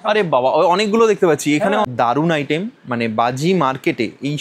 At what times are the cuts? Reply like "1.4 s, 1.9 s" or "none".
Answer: 1.9 s